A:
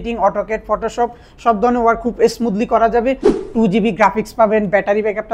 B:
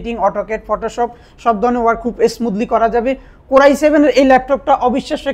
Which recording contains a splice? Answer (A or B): A